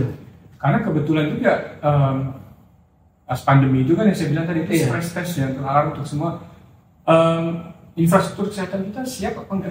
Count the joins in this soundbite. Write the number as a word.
zero